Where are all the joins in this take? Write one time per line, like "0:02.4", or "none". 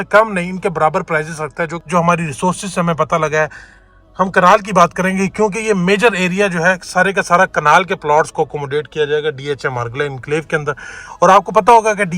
0:01.9